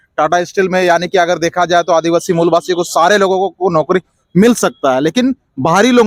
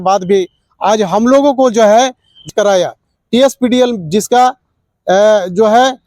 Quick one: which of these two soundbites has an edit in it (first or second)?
second